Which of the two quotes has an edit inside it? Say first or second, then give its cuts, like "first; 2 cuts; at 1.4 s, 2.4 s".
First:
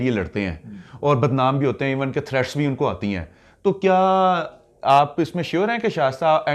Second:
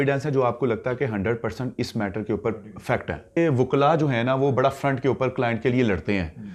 second; 1 cut; at 3.4 s